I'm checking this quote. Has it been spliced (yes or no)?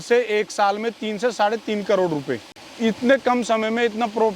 yes